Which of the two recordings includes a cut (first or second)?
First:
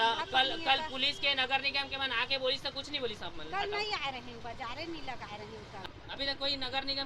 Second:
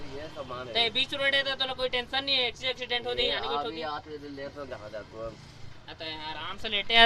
first